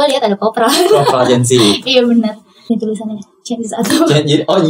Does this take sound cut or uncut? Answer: cut